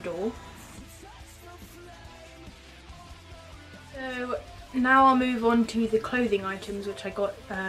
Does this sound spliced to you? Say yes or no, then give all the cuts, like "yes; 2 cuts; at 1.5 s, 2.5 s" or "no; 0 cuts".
yes; 1 cut; at 4.4 s